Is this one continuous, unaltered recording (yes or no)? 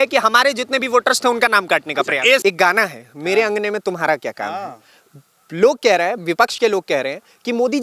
no